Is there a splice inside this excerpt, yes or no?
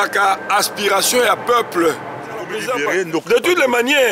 yes